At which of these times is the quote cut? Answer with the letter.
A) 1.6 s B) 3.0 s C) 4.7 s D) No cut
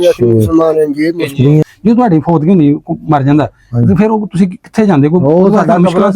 A